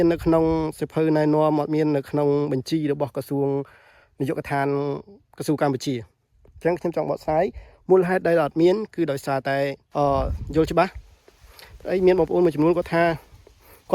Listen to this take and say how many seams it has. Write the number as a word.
one